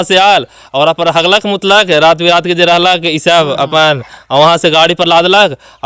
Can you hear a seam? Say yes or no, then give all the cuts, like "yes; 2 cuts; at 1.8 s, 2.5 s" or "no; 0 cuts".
no; 0 cuts